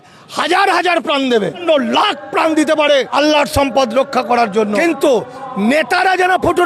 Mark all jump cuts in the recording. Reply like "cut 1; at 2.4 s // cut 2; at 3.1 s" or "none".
cut 1; at 1.6 s // cut 2; at 3.1 s // cut 3; at 4.7 s